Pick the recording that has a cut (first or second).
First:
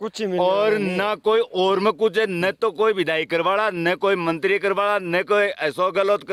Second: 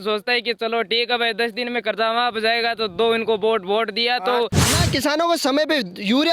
second